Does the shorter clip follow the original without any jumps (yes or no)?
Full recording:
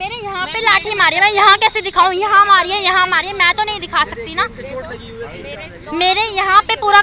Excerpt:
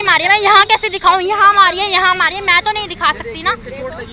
yes